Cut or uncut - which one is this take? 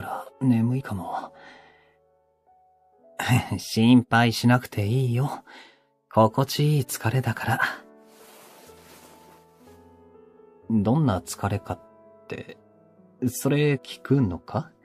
cut